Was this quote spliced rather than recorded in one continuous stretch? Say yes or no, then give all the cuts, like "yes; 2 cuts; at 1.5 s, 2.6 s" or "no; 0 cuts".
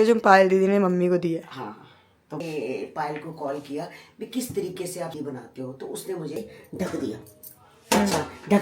yes; 3 cuts; at 2.4 s, 5.1 s, 6.4 s